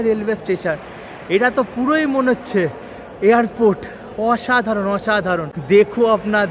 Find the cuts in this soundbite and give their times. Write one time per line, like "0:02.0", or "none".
0:05.5